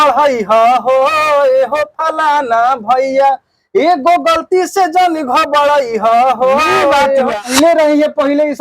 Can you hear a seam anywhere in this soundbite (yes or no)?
yes